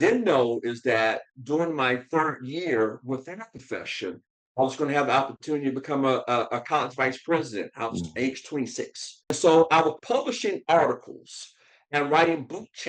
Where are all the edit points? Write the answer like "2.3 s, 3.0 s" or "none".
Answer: 9.4 s